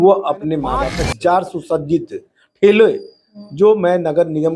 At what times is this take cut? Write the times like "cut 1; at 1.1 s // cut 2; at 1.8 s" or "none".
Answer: cut 1; at 1.0 s